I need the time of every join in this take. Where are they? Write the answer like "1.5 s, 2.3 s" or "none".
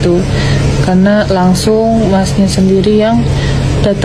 none